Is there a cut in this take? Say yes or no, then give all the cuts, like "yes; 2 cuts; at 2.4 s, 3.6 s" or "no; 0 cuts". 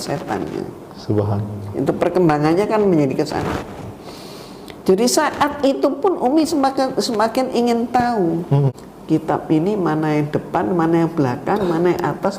yes; 1 cut; at 8.7 s